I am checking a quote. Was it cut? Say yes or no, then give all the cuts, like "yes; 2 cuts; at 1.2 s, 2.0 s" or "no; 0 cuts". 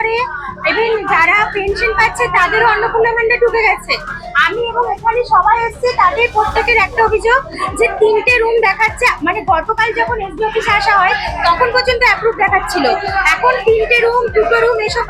no; 0 cuts